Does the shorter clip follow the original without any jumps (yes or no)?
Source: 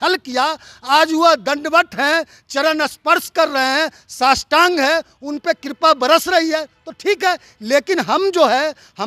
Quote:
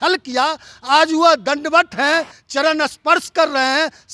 yes